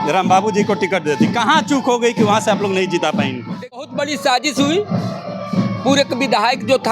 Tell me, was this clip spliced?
yes; 1 cut; at 3.8 s

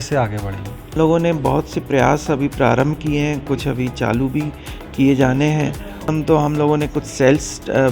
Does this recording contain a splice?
yes; 2 cuts; at 0.9 s, 6.1 s

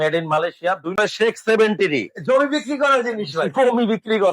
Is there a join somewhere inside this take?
yes; 1 cut; at 1.0 s

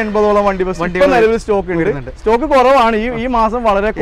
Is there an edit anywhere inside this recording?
no; 0 cuts

